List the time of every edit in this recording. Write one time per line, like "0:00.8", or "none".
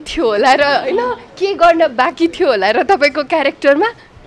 none